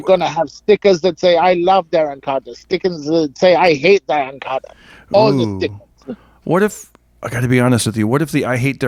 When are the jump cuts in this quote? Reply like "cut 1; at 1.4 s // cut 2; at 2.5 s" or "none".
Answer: none